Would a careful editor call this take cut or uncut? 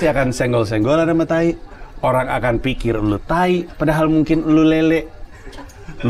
uncut